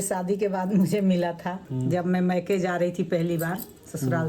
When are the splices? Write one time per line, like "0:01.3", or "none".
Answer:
0:01.6